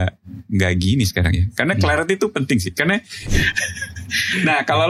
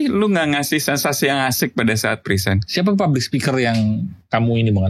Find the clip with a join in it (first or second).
first